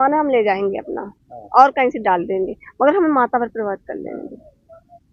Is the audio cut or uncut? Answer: uncut